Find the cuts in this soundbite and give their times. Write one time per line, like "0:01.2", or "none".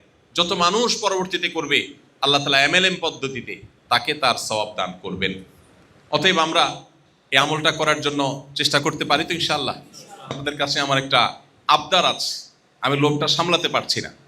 0:10.4